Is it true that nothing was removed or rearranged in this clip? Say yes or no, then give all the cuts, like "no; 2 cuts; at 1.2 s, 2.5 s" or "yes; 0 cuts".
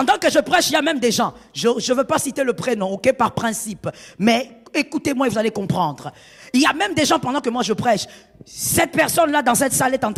yes; 0 cuts